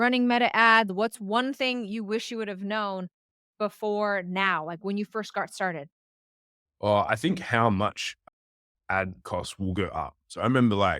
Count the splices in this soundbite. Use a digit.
1